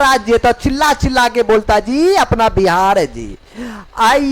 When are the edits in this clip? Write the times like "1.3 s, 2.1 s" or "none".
none

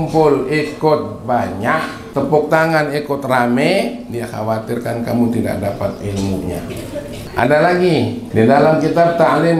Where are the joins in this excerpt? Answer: 2.0 s, 7.2 s, 8.2 s

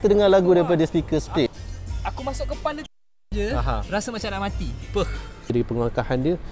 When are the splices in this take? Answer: 1.5 s, 5.5 s

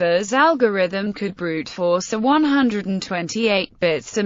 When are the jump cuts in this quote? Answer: none

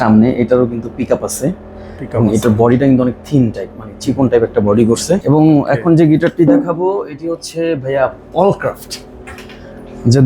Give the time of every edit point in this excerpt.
5.2 s

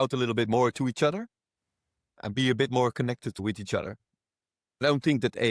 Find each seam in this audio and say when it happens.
3.4 s

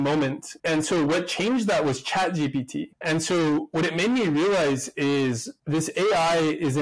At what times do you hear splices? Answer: none

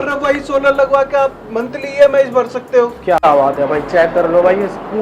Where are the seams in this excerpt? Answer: 3.2 s

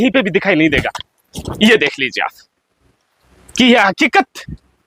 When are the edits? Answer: none

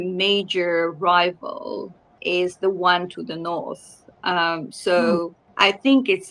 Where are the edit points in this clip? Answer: 2.2 s, 5.4 s

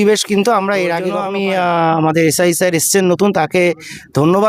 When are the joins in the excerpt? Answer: 1.2 s

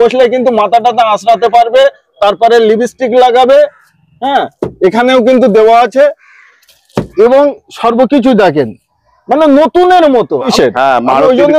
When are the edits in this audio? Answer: 10.5 s

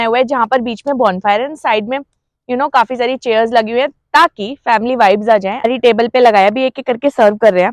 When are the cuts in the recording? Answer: 5.7 s

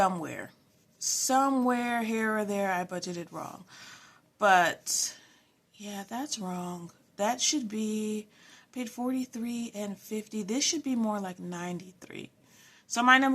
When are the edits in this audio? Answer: none

